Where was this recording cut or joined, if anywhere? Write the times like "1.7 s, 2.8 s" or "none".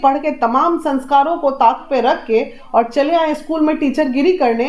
none